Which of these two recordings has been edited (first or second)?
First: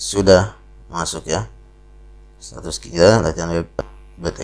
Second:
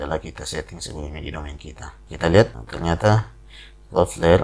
second